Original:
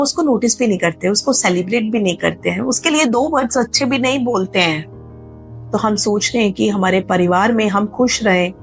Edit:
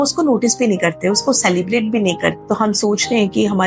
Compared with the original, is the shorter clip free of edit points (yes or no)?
no